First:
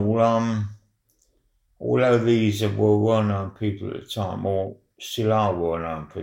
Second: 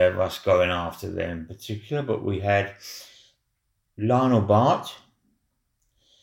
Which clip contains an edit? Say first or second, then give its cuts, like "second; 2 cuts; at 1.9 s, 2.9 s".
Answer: first; 1 cut; at 4.7 s